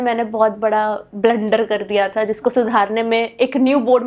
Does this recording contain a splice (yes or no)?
no